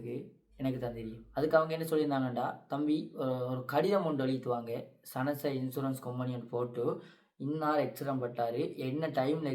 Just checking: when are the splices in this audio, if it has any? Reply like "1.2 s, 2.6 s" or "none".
1.2 s